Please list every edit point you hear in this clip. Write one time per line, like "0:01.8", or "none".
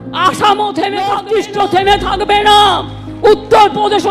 0:01.2